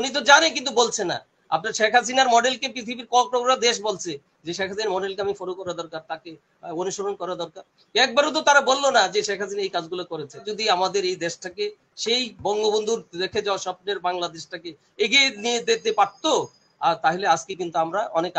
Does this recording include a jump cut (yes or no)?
yes